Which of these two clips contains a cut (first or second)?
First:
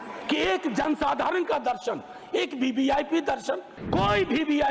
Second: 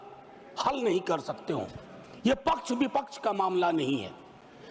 first